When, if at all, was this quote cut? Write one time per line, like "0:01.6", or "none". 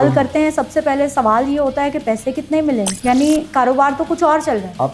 0:02.9